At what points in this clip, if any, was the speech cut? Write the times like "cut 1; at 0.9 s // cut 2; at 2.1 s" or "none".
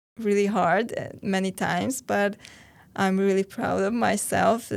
none